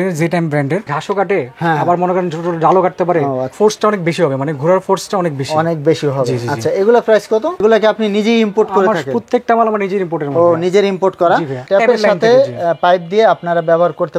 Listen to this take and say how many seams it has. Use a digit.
4